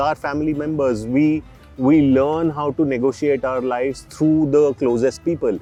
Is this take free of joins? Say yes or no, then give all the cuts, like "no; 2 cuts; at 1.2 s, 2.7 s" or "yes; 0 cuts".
yes; 0 cuts